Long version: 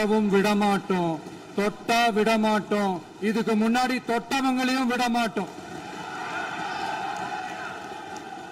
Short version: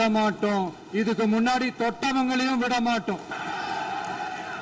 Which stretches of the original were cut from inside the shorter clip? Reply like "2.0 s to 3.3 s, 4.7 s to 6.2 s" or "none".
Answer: 5.6 s to 6.4 s

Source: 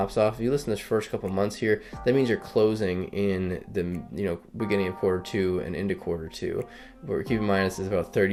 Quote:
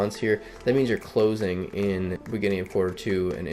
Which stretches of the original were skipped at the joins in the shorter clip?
3.6 s to 4.5 s

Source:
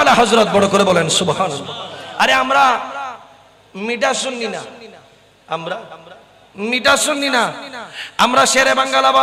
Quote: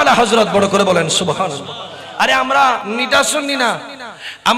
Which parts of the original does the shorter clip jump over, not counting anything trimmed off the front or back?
2.8 s to 6.6 s

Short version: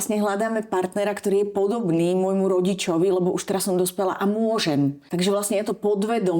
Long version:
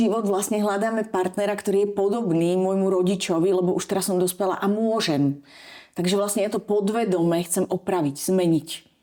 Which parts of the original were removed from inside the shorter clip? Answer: 5.4 s to 5.9 s

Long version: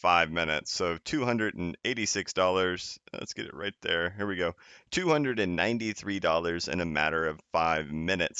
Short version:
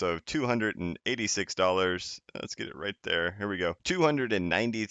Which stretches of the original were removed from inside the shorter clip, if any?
4.6 s to 4.9 s

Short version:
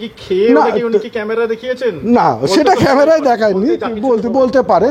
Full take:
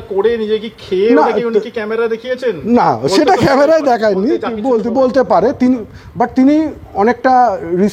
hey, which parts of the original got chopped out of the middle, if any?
none

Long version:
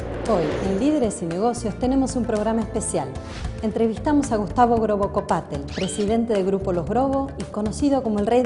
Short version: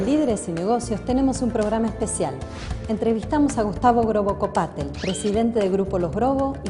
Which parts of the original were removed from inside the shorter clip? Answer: none

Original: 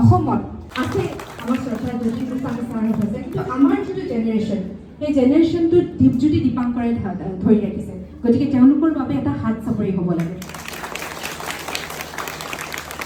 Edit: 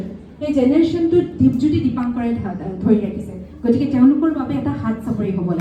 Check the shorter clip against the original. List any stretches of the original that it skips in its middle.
none

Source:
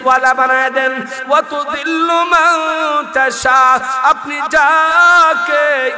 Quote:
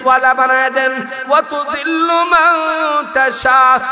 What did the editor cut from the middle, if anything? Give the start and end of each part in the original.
none

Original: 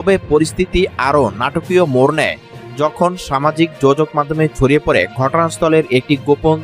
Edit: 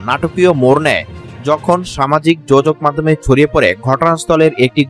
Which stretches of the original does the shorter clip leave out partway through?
none

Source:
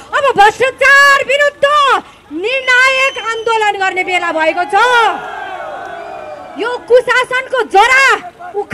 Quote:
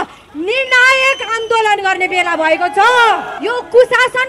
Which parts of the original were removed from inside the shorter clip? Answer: 5.3 s to 6.5 s

